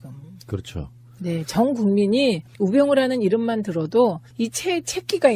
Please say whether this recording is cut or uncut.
cut